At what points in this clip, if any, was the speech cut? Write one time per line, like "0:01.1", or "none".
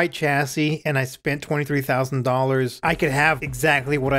0:03.1